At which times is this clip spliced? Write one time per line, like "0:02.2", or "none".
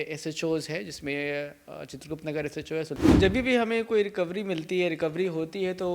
0:02.9

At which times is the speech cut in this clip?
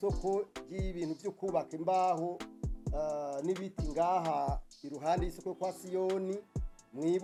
none

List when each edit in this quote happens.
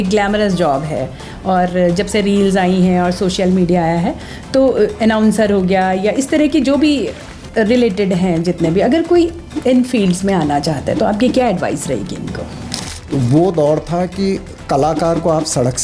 0:13.1

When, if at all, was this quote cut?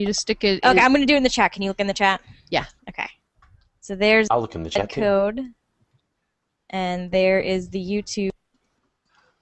0:01.8

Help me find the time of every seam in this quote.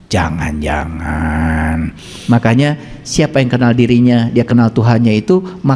0:02.1

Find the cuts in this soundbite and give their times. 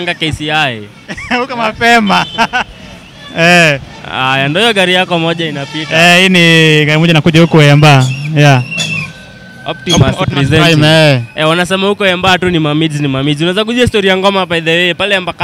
none

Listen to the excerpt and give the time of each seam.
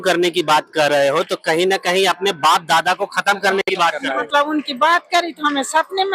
0:04.3

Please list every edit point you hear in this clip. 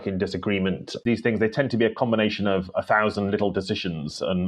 0:00.9

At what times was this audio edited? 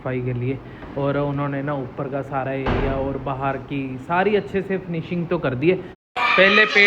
0:05.9

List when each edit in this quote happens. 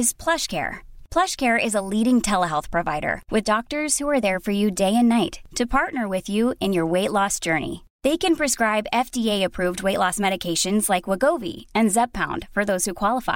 none

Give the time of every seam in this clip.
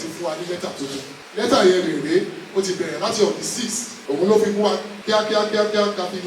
0:01.2
0:03.9
0:04.9

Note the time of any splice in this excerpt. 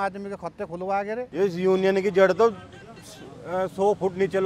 0:01.2

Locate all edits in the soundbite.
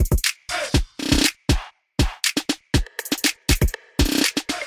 0:00.9

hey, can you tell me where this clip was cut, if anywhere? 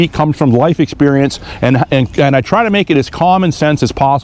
none

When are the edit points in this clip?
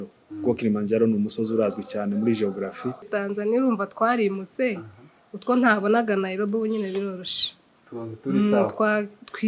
0:03.1

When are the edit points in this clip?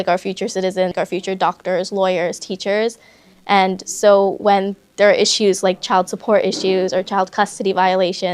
0:00.9

